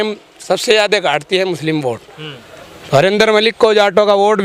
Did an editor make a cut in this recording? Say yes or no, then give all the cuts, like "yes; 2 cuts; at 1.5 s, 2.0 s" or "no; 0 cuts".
no; 0 cuts